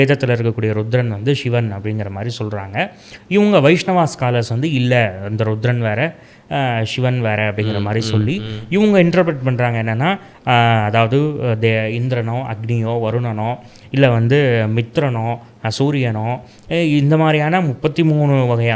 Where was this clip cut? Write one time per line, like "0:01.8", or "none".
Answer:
none